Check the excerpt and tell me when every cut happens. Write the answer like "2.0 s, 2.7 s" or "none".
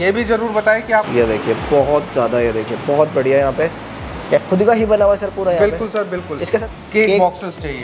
1.1 s, 6.7 s